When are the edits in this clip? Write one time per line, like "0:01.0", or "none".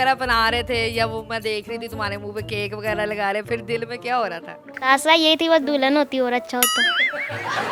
none

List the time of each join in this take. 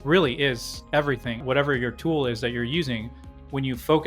0:01.4

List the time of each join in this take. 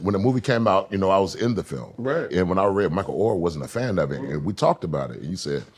0:02.3

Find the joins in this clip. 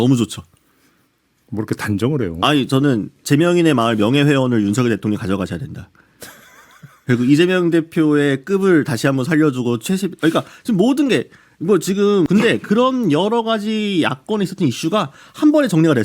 0:12.3

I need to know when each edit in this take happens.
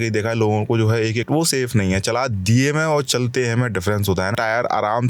0:01.2
0:04.3

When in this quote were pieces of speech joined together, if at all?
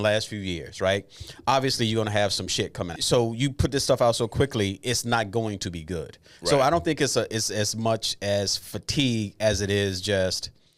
0:03.0

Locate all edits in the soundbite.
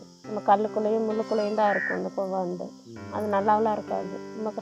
none

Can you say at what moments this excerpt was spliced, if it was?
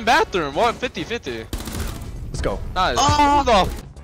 none

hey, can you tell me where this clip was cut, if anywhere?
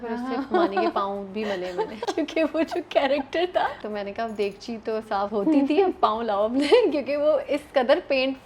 0:02.0
0:03.8
0:05.3

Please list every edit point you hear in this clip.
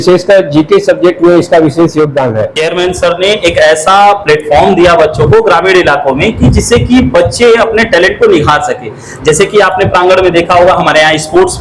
0:02.6

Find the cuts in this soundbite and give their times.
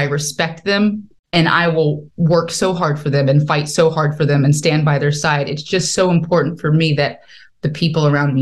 0:01.1

